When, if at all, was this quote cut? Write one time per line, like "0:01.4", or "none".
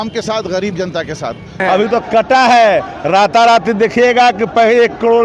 0:01.6